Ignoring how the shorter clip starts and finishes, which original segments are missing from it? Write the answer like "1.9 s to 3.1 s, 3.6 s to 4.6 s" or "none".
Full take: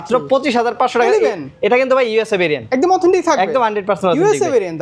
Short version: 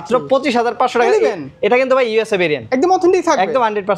none